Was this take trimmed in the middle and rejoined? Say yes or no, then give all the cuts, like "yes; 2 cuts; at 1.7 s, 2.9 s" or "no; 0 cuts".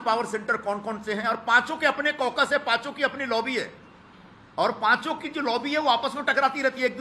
no; 0 cuts